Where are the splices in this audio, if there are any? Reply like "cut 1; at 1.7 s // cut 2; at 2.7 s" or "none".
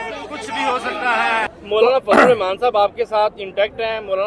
cut 1; at 1.5 s